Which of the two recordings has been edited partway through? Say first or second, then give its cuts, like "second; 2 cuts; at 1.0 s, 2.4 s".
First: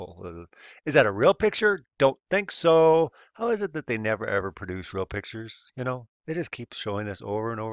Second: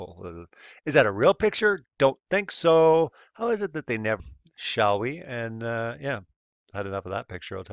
first; 1 cut; at 4.2 s